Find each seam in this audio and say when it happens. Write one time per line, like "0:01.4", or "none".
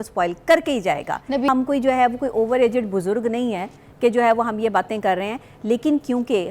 0:01.5